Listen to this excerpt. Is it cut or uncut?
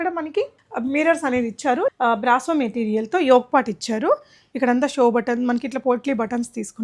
cut